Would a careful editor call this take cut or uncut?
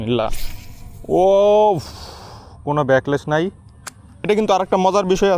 cut